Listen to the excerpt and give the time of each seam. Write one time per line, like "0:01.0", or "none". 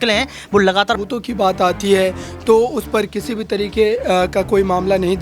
0:01.0
0:03.9